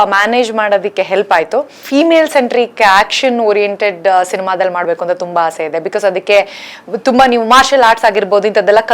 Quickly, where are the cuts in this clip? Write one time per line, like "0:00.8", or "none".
0:01.8